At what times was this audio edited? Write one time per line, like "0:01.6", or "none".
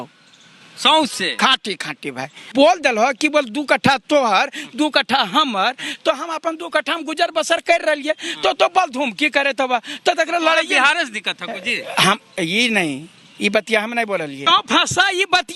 0:02.5
0:14.4